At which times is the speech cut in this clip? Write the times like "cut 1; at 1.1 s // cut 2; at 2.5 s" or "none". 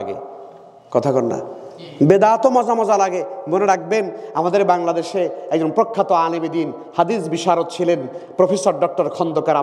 none